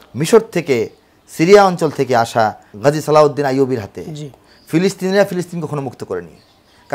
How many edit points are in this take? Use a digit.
1